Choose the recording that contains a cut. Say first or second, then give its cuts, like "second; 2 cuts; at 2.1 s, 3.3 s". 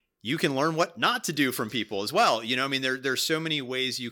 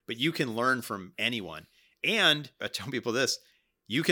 second; 2 cuts; at 1.1 s, 2.7 s